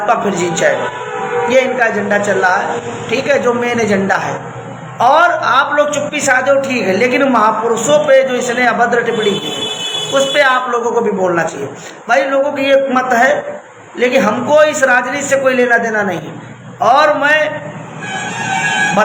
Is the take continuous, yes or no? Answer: yes